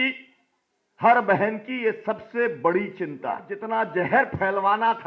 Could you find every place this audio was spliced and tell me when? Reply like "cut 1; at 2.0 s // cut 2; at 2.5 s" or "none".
cut 1; at 3.5 s

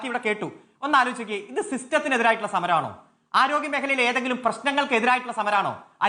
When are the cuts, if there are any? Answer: none

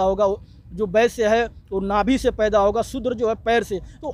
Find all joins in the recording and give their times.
none

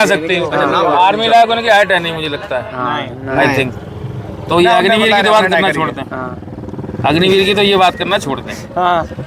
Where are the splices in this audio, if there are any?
none

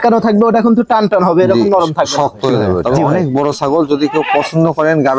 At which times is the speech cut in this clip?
cut 1; at 2.8 s

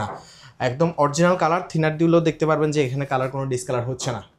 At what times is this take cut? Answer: none

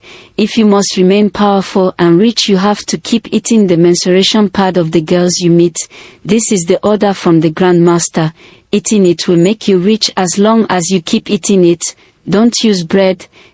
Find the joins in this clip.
none

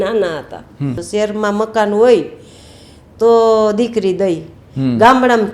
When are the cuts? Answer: cut 1; at 1.0 s

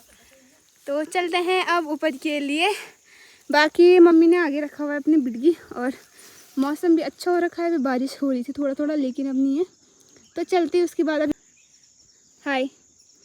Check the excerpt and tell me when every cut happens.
cut 1; at 11.3 s

